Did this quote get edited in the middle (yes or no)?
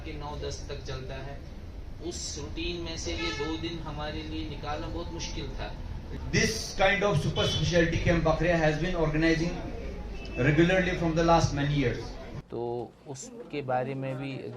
yes